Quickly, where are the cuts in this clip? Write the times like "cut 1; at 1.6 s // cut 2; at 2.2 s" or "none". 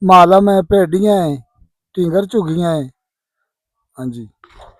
none

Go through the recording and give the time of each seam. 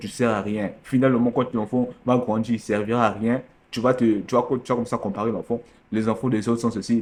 none

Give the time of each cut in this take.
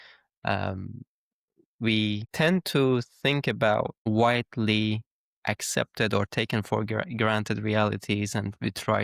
cut 1; at 2.3 s // cut 2; at 4.0 s

